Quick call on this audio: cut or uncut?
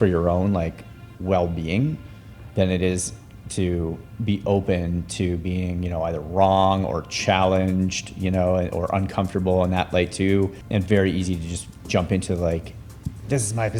cut